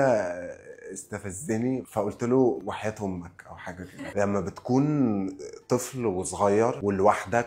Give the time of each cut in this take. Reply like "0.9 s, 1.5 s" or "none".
2.6 s, 4.1 s